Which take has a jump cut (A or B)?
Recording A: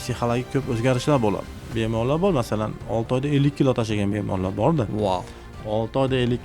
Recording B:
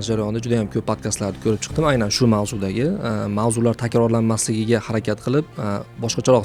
A